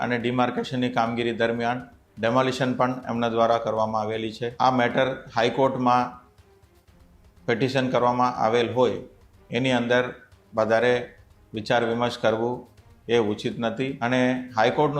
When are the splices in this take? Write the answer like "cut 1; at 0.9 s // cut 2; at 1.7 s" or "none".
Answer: cut 1; at 4.5 s // cut 2; at 14.0 s